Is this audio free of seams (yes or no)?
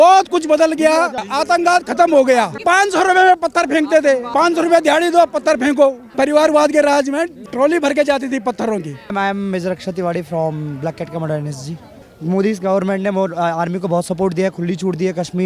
no